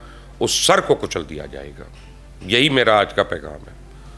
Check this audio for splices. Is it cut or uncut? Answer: uncut